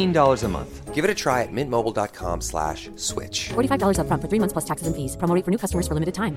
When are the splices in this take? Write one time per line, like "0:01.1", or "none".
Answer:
none